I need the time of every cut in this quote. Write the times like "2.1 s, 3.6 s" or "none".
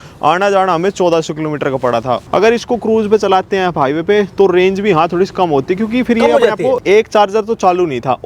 2.2 s, 6.8 s